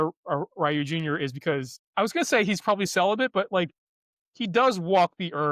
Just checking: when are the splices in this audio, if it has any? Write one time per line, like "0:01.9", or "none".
0:01.8